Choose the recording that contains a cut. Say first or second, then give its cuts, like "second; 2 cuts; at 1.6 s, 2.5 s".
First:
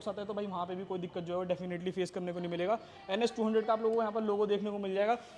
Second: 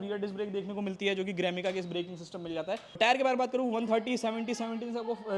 second; 1 cut; at 3.0 s